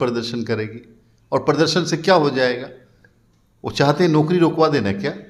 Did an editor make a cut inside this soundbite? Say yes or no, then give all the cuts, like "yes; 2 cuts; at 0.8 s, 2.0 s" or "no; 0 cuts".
no; 0 cuts